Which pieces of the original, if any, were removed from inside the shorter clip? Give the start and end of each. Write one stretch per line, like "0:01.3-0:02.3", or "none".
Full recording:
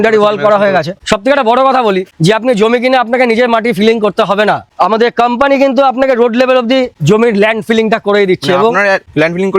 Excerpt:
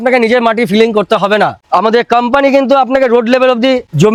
none